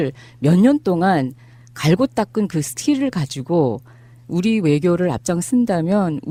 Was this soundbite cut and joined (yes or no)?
no